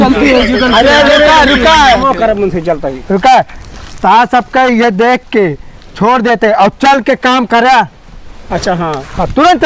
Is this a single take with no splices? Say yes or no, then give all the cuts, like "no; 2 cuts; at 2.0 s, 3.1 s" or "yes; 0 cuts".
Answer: yes; 0 cuts